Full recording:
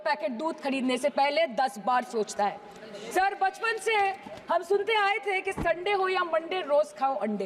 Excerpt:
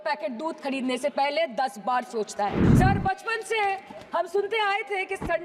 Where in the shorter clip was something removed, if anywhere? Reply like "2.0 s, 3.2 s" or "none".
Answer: 2.6 s